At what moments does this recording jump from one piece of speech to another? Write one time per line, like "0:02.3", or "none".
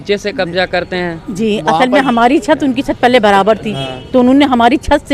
none